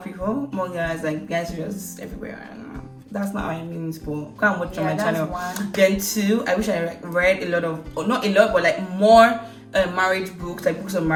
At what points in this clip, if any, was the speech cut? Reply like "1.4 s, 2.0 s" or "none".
none